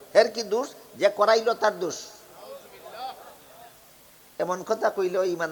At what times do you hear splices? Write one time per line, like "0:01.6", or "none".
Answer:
none